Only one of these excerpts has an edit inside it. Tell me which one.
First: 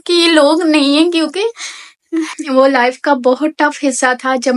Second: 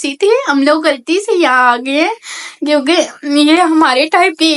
first; 1 cut; at 2.4 s

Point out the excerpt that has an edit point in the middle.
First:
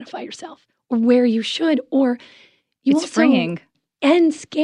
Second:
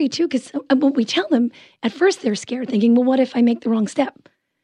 first; 1 cut; at 3.7 s

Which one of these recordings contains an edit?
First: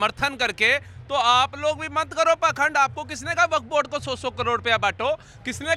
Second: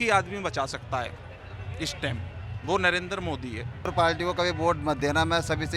second; 1 cut; at 3.9 s

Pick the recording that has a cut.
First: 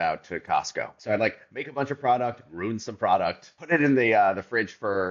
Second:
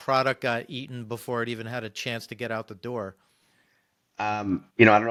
first; 2 cuts; at 0.9 s, 3.5 s

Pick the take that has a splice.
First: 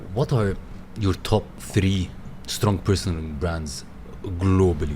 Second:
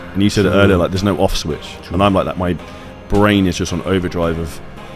first; 1 cut; at 1.6 s

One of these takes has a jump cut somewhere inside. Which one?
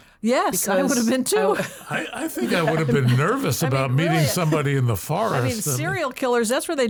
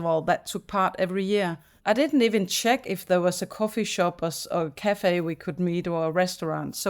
second; 1 cut; at 1.7 s

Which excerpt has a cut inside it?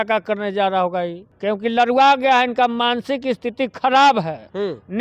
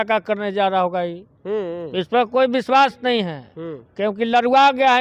first; 1 cut; at 1.2 s

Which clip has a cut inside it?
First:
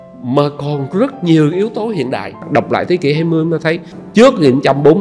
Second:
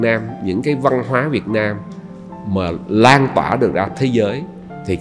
first; 2 cuts; at 2.4 s, 3.9 s

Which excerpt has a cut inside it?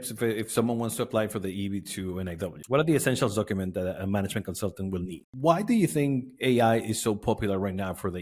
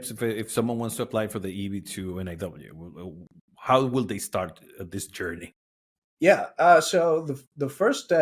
first; 2 cuts; at 2.5 s, 5.2 s

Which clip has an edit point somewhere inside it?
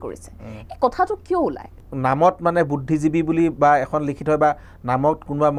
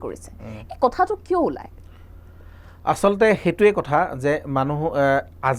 first; 1 cut; at 1.8 s

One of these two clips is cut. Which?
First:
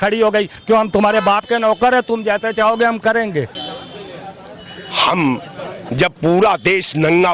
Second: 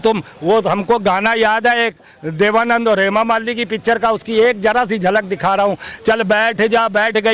first; 1 cut; at 3.6 s

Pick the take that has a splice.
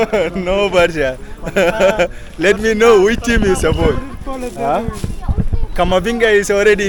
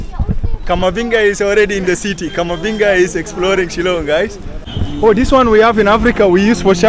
second; 1 cut; at 4.7 s

